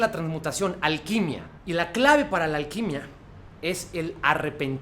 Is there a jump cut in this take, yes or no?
yes